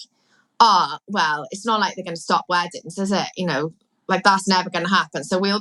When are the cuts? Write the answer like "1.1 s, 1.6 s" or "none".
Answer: none